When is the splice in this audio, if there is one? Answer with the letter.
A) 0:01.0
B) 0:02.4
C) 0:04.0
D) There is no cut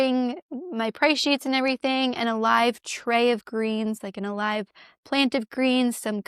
C